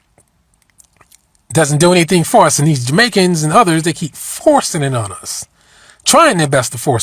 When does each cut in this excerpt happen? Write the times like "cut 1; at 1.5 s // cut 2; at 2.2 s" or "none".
none